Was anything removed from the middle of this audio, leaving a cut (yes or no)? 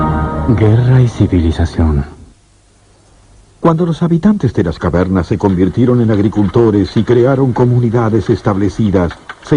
yes